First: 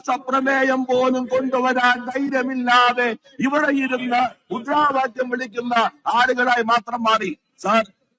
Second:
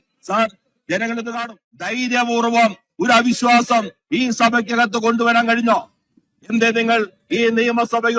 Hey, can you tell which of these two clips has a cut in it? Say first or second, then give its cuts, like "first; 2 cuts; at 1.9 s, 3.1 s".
second; 1 cut; at 1.9 s